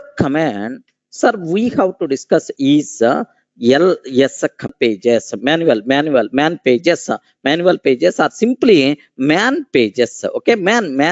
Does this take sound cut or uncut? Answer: cut